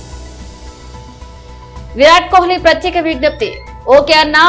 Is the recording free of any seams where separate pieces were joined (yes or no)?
no